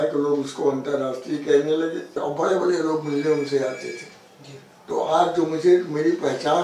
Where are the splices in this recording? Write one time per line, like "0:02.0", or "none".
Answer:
0:02.2